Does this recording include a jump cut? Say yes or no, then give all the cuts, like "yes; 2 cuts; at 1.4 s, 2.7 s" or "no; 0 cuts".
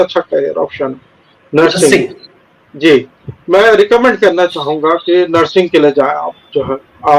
no; 0 cuts